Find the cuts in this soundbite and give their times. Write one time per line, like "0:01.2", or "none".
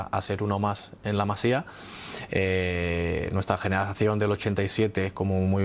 none